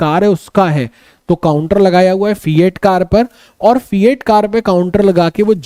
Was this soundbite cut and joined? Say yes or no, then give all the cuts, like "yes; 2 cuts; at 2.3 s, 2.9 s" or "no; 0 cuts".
no; 0 cuts